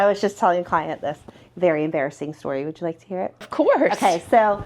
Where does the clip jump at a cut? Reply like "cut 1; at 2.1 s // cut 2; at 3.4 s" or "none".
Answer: cut 1; at 3.5 s